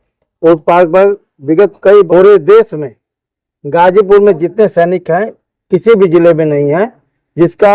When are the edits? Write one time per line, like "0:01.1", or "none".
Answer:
0:02.1

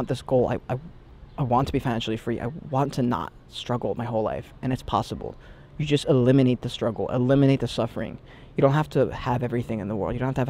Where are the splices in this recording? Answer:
none

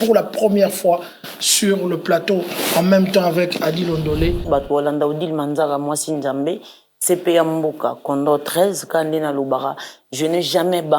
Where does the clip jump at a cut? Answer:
0:04.4

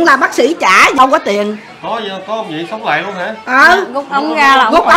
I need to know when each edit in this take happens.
0:00.9

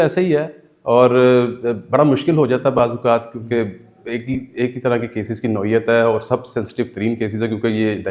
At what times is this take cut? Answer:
none

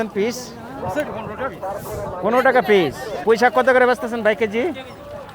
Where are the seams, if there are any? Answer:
0:03.1

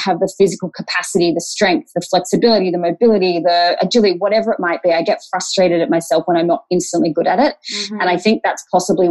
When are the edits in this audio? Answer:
none

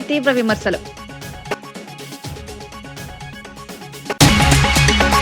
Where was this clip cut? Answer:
0:04.3

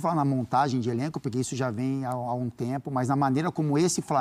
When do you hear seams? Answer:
none

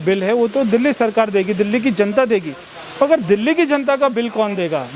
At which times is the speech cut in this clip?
none

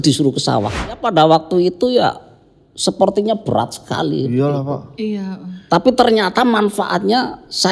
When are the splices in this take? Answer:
0:01.0

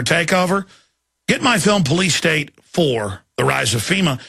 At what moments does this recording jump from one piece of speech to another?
none

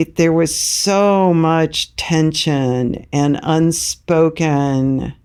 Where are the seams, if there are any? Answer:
none

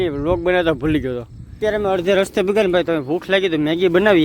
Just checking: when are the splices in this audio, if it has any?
0:01.4

